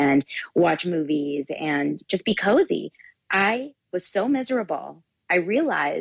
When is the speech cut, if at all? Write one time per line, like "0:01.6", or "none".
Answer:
0:02.0
0:03.8

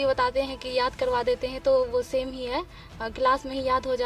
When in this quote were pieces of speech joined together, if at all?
none

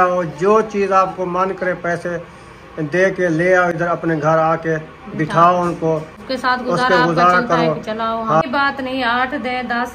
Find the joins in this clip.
0:06.1
0:08.4

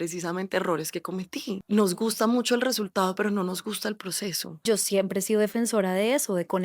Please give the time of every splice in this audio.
0:01.6
0:04.6

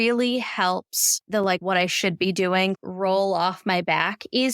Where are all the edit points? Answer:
none

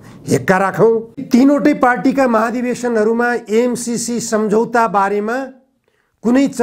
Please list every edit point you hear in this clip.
0:01.2

